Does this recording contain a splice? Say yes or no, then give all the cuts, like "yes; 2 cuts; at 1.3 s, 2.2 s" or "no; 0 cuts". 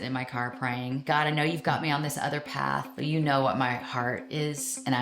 yes; 2 cuts; at 1.0 s, 2.9 s